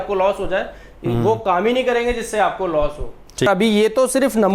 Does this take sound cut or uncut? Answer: cut